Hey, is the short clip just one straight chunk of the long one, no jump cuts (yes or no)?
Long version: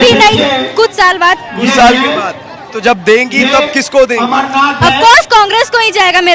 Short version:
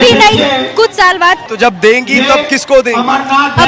no